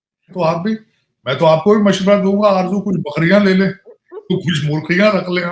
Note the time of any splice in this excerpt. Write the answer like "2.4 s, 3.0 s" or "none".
none